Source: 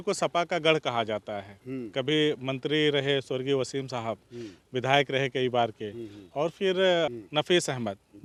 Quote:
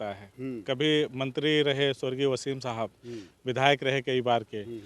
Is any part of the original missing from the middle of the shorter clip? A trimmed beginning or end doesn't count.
no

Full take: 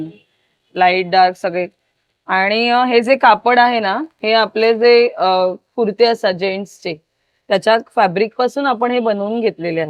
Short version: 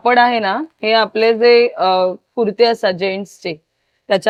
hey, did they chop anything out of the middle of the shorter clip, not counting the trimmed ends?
no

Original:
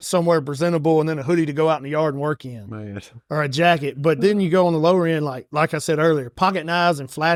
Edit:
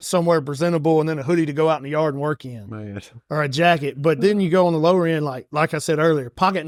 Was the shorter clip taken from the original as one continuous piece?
yes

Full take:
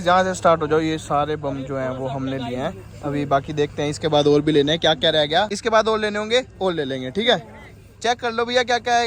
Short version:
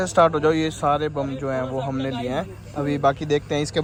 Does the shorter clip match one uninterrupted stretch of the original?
yes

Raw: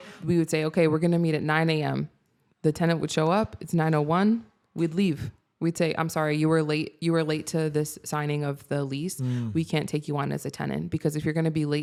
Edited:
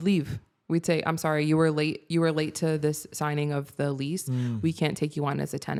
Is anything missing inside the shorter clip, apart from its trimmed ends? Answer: no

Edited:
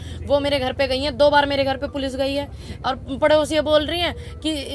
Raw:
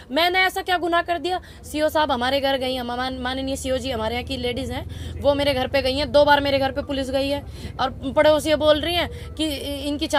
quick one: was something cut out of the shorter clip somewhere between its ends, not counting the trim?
no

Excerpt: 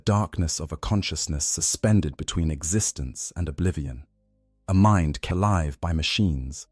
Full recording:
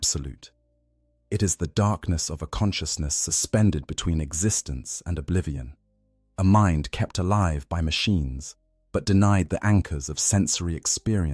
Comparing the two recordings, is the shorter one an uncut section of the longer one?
no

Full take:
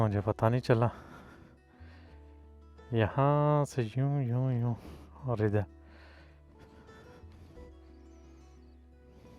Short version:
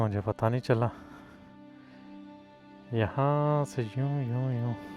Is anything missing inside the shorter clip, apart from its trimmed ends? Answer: no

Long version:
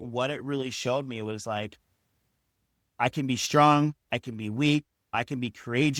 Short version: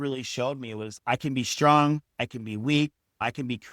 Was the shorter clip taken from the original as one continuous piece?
no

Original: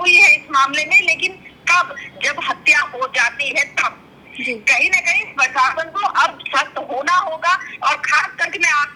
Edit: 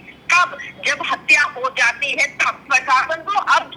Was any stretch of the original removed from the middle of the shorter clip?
yes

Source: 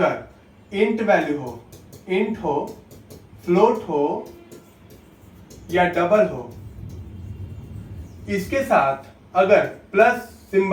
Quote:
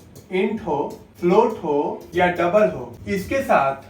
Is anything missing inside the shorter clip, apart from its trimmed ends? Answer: yes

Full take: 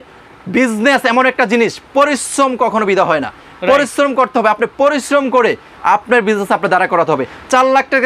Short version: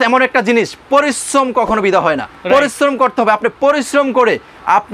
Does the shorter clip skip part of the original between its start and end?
yes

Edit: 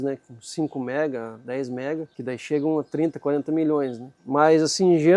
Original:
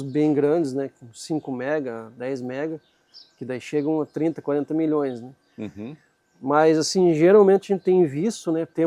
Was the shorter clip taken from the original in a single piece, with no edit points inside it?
no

